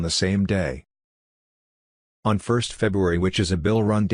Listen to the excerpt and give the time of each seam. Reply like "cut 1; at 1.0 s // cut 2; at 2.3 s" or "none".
none